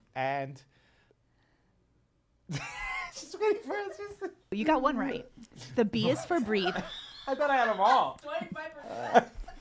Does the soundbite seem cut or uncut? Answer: cut